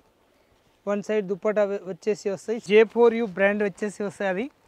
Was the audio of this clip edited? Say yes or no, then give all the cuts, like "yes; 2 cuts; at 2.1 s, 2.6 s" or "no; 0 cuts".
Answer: yes; 1 cut; at 2.6 s